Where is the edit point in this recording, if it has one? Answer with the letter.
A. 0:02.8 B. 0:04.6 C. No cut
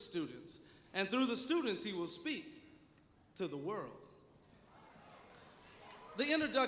B